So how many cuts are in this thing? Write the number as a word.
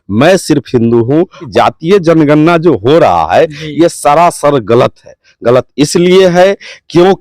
one